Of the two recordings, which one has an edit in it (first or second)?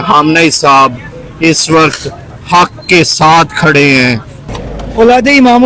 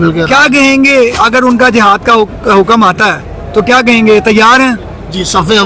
first